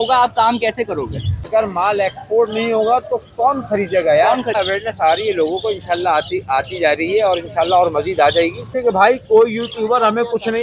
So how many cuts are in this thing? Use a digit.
3